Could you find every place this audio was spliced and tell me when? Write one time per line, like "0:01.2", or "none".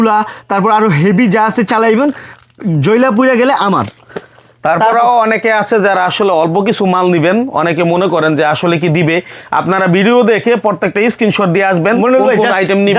none